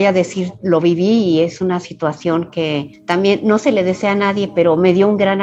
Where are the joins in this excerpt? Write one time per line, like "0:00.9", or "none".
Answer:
none